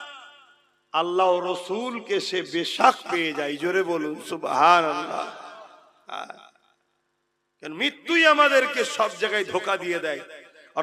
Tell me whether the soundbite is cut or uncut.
uncut